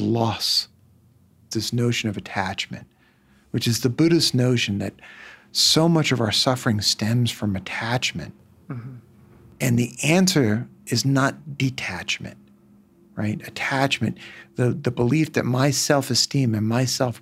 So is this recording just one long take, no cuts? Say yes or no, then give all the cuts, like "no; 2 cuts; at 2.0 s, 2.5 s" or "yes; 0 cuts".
no; 1 cut; at 1.5 s